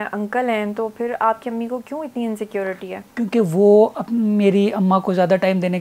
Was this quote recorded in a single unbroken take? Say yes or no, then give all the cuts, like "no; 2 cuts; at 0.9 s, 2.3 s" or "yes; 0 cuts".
yes; 0 cuts